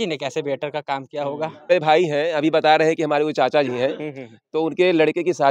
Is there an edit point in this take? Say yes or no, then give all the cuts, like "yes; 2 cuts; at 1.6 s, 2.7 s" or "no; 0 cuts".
yes; 1 cut; at 1.7 s